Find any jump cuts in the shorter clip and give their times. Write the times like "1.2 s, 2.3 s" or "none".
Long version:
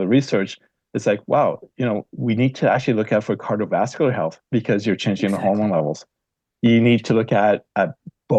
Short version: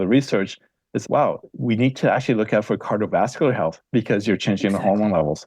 1.0 s